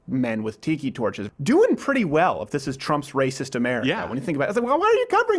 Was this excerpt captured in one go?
no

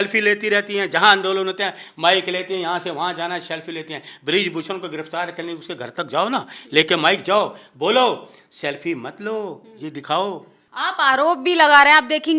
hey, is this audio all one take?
yes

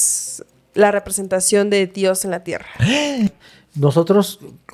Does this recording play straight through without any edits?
no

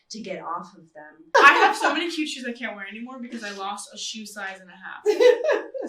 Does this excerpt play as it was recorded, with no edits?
no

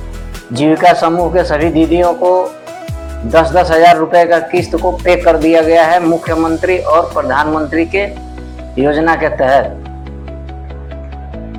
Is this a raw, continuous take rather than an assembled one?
yes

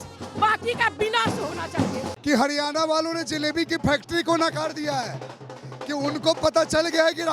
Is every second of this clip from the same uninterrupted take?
no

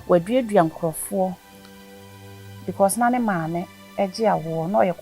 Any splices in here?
no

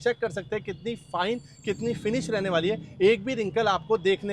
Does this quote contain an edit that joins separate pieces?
no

